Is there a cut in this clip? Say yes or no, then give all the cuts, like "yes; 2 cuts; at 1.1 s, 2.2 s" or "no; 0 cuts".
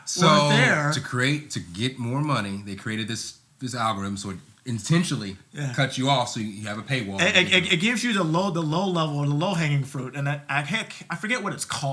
no; 0 cuts